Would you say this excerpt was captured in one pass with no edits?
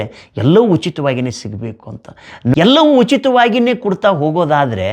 no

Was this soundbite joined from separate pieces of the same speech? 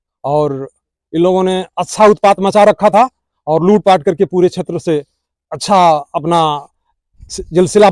no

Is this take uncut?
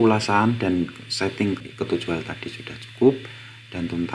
no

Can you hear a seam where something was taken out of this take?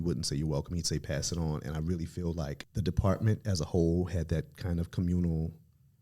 yes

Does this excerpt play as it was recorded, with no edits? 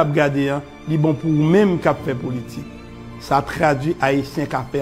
yes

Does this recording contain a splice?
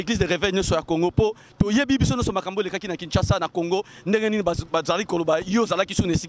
no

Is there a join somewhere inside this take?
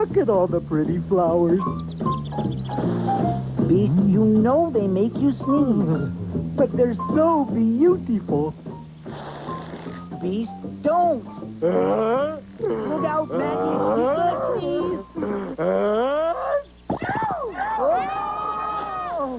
no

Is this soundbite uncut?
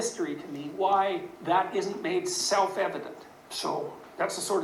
no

